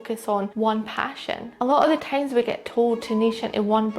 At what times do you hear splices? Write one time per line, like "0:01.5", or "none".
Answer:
0:01.6

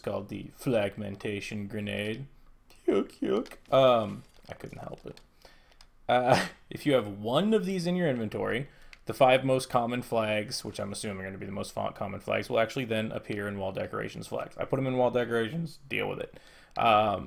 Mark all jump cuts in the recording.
0:04.3

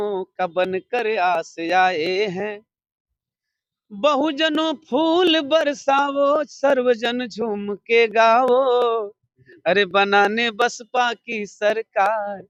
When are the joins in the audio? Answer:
none

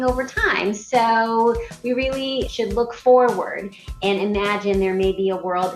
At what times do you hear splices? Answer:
0:02.5

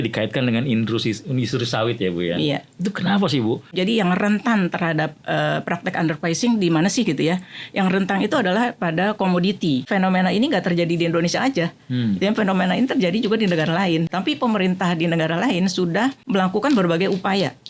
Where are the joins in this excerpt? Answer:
0:03.7
0:09.9
0:14.1
0:16.2

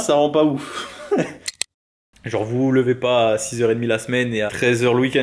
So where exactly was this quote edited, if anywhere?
0:01.7
0:04.5

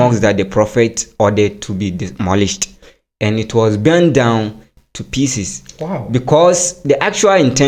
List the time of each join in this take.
none

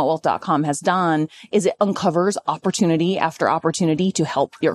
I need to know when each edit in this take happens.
none

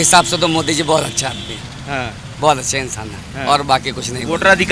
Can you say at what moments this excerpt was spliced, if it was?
none

